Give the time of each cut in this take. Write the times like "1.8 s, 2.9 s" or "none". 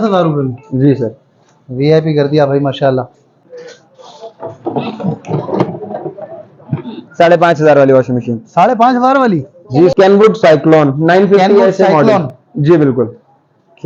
3.4 s, 9.9 s